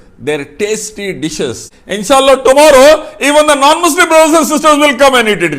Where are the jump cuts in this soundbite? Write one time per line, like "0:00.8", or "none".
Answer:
0:01.7